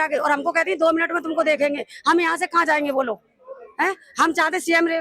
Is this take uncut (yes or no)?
yes